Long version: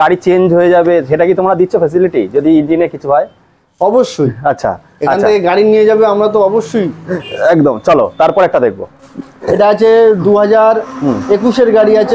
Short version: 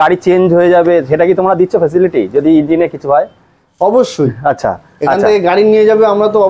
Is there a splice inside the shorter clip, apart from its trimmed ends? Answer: no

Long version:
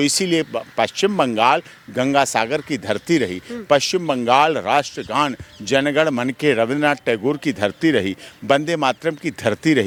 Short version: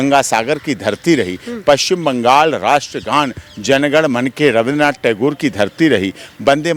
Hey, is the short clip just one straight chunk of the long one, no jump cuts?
yes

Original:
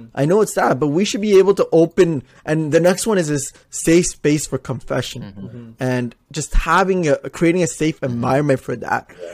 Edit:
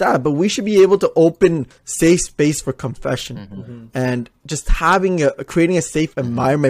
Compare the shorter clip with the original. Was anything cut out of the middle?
yes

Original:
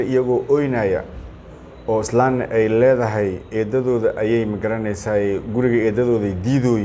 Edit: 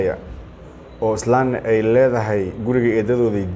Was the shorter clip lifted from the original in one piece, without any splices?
no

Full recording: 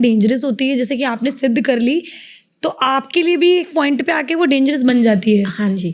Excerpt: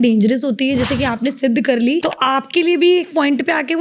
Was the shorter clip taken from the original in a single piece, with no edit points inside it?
no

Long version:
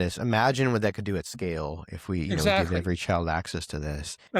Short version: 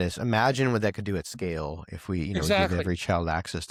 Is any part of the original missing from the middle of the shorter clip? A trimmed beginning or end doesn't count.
no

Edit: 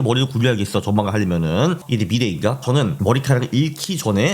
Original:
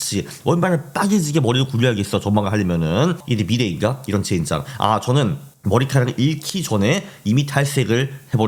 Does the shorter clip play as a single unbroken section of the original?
no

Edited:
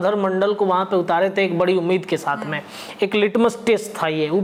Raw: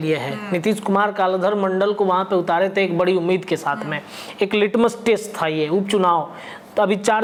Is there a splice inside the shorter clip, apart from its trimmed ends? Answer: no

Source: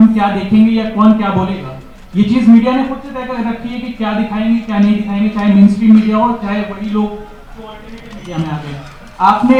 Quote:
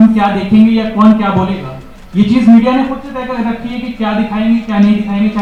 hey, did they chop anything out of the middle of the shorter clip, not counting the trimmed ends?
no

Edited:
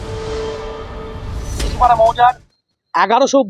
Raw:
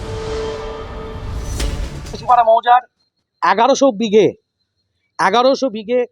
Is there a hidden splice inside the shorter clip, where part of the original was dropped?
yes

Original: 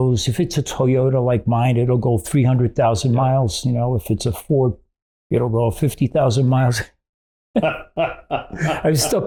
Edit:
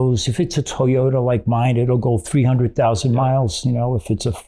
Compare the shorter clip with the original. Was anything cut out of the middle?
no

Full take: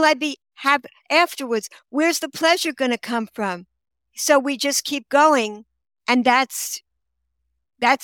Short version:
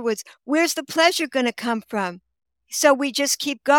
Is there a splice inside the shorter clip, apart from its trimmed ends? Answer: no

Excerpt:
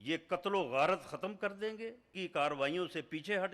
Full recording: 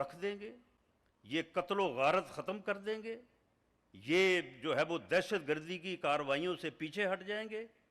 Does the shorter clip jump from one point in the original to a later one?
yes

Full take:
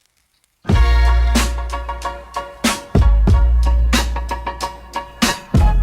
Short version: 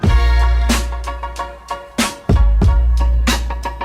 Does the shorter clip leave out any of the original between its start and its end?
no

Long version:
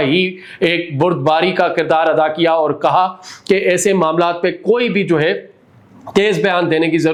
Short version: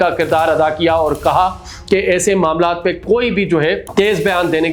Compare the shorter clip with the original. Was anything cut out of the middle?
yes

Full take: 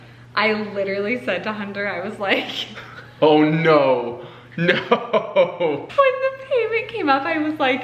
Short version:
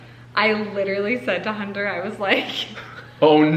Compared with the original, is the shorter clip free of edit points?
yes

